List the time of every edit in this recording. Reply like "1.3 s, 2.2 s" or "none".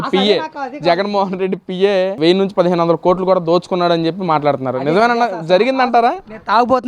2.1 s